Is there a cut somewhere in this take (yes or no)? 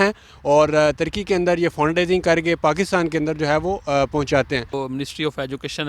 yes